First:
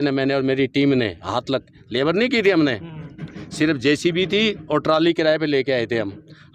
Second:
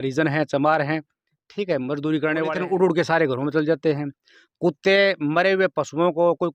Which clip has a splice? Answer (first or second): second